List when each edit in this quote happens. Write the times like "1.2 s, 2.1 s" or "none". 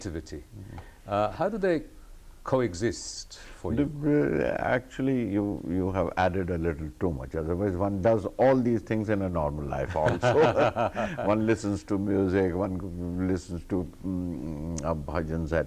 none